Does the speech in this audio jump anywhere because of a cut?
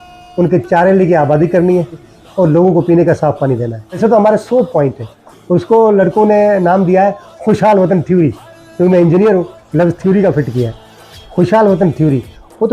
yes; 2 cuts; at 2.1 s, 4.0 s

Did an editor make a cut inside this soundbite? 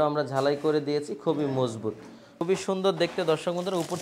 yes; 1 cut; at 2.4 s

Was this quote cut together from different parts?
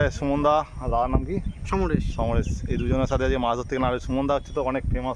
no; 0 cuts

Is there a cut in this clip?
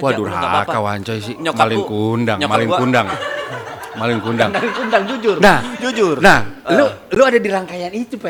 no; 0 cuts

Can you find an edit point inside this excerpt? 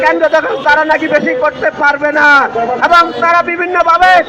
no; 0 cuts

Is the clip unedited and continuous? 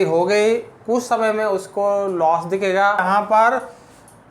no; 1 cut; at 3.0 s

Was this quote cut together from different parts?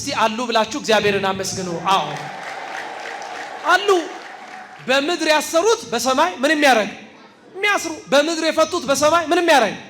no; 0 cuts

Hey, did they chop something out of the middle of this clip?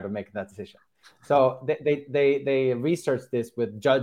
no; 0 cuts

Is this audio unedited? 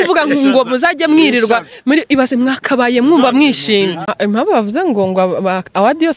no; 1 cut; at 4.1 s

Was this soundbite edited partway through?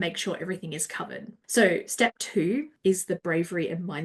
yes; 2 cuts; at 1.3 s, 2.7 s

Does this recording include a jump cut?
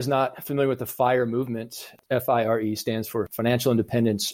no; 0 cuts

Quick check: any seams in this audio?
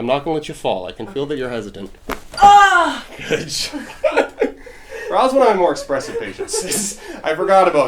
no; 0 cuts

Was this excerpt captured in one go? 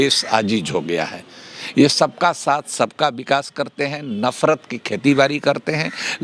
yes; 0 cuts

